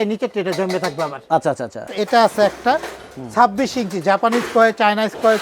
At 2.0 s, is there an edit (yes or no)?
yes